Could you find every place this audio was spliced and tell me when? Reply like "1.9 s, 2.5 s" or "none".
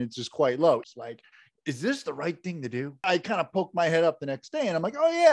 0.8 s, 3.0 s